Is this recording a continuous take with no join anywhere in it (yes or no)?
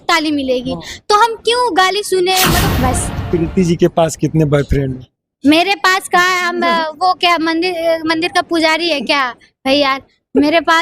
no